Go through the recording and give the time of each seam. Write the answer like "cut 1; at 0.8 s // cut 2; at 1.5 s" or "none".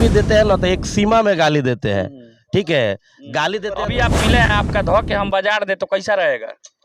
cut 1; at 3.8 s